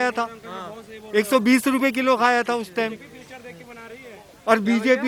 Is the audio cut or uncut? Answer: uncut